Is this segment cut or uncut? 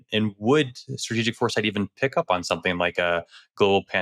uncut